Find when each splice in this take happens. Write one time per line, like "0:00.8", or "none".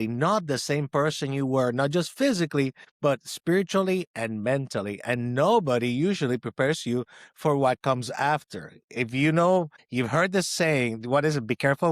0:02.8
0:09.8